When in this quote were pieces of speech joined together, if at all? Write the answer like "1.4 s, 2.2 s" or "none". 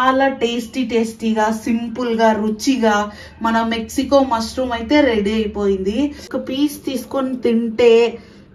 6.3 s